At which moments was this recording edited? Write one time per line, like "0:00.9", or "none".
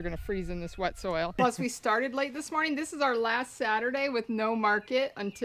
0:01.3